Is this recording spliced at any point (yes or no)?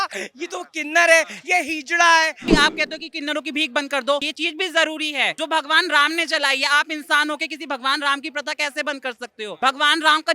yes